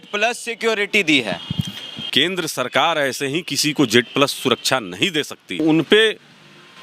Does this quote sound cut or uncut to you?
cut